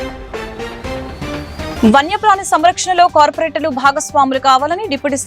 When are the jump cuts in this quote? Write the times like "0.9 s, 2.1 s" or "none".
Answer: 1.3 s

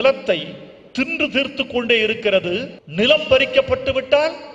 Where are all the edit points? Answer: 2.8 s

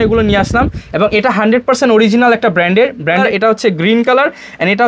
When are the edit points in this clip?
3.2 s

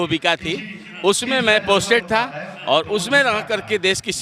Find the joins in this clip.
none

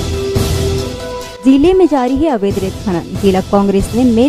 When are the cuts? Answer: 1.3 s

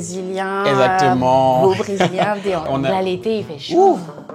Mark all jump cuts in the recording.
2.7 s

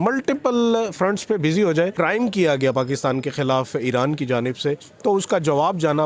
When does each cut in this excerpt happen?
1.9 s

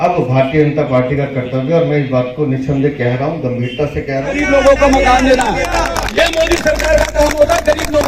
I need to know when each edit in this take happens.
4.4 s

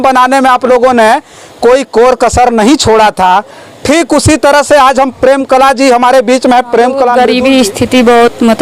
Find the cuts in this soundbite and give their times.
7.1 s

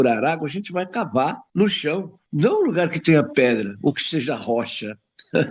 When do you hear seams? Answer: 1.4 s, 2.2 s

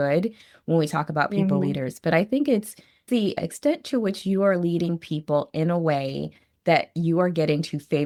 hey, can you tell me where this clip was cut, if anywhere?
none

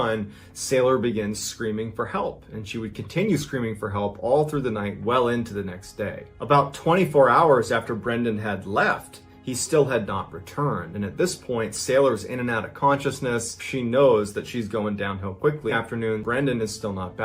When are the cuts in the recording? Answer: 15.7 s

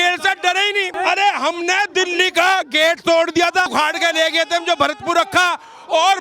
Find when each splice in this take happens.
0.9 s, 3.7 s

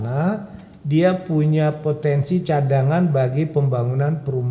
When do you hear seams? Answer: none

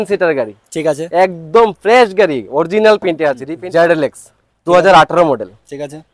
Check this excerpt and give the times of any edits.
3.5 s

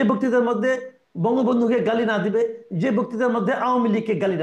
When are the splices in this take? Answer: none

